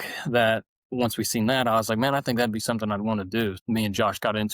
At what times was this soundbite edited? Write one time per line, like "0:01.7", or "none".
0:03.6